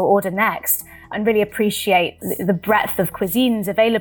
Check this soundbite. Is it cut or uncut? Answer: cut